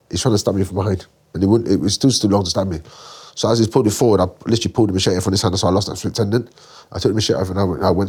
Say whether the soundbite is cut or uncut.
uncut